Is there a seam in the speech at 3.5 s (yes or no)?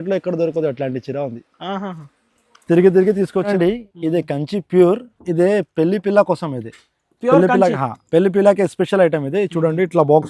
yes